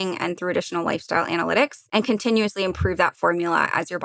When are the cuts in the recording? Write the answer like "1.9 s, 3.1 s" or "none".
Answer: 1.8 s